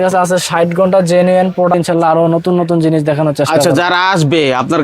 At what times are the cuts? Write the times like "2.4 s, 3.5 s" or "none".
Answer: 1.7 s